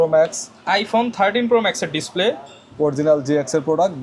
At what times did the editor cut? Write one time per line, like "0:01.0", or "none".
none